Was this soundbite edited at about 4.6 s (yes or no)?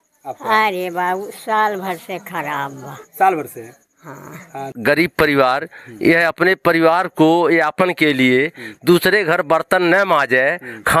yes